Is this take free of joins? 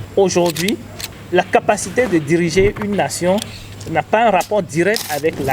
yes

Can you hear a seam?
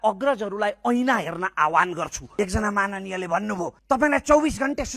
yes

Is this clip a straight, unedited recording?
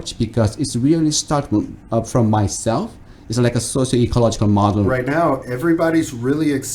no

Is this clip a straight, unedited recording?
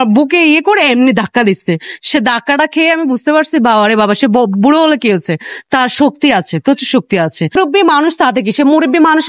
yes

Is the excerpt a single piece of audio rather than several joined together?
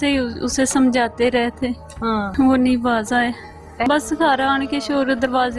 no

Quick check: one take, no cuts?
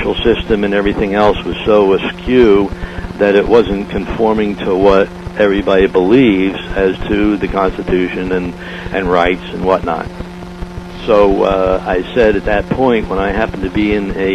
no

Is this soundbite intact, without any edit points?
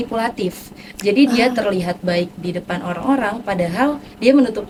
yes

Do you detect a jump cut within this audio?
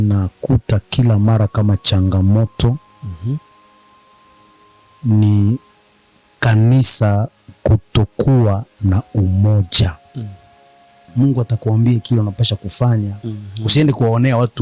yes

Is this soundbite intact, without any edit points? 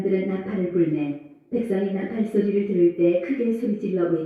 yes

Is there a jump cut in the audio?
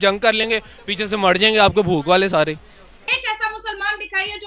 yes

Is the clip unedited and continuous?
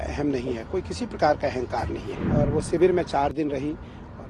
no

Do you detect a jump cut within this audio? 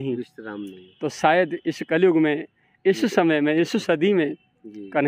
no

